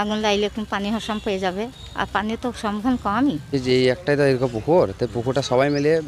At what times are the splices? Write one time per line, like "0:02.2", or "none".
0:03.5

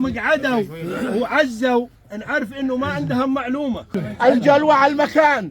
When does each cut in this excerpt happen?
0:04.0

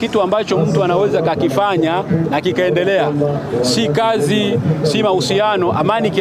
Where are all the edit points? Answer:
none

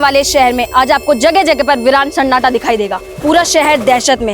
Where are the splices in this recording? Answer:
0:03.0

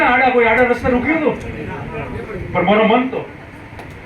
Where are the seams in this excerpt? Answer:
none

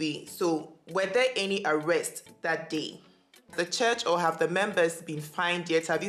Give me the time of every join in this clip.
0:03.5

